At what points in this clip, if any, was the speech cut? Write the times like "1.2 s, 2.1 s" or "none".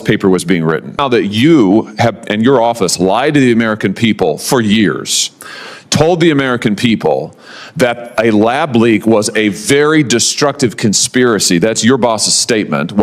1.0 s